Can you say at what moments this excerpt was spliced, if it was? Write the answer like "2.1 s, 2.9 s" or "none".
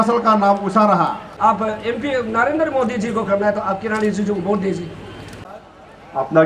1.4 s, 5.5 s